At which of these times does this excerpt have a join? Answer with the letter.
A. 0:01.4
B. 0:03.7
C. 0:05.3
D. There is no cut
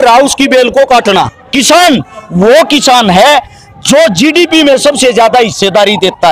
A